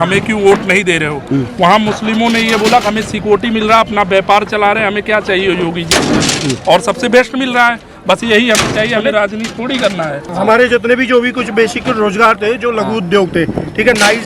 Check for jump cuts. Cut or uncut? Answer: cut